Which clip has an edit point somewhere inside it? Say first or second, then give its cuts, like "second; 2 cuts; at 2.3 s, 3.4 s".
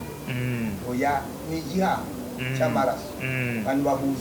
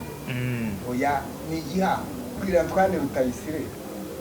second; 1 cut; at 2.4 s